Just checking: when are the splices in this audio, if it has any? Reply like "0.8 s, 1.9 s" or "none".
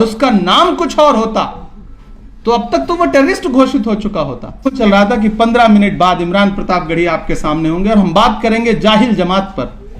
4.8 s

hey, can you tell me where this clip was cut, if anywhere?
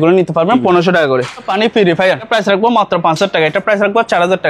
1.5 s, 2.3 s

